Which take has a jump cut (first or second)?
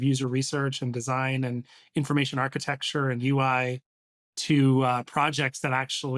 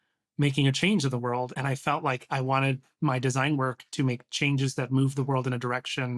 second